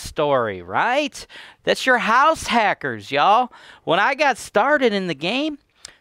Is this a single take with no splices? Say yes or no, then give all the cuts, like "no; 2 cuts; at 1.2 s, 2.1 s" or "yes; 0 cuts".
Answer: yes; 0 cuts